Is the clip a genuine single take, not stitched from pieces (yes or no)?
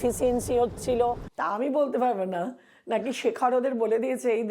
no